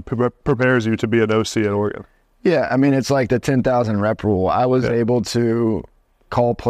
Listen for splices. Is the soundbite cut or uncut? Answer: uncut